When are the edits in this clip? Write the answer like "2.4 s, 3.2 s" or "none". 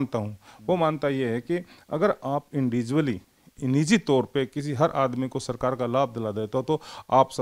none